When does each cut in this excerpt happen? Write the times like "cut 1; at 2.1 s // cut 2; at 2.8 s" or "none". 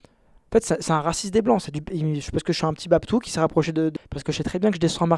cut 1; at 3.9 s

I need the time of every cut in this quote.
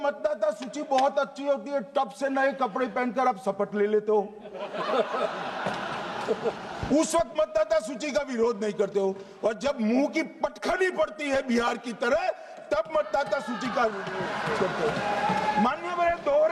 none

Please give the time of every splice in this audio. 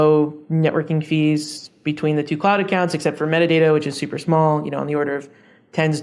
none

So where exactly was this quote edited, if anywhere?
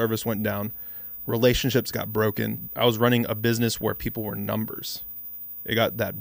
cut 1; at 2.6 s

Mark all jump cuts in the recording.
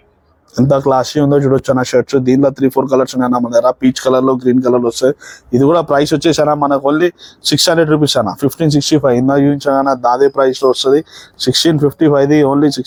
none

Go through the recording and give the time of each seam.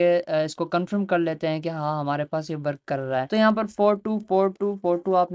cut 1; at 3.3 s

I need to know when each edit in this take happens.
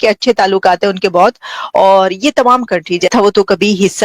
cut 1; at 3.1 s

